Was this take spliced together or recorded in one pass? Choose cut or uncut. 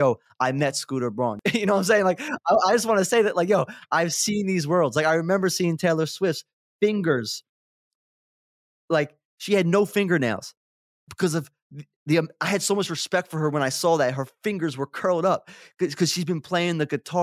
uncut